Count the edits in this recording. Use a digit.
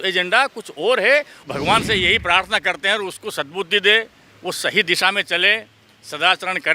1